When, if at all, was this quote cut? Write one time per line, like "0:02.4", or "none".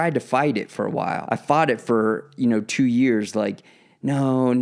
0:01.2